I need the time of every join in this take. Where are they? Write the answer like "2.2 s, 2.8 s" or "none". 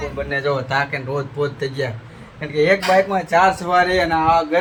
none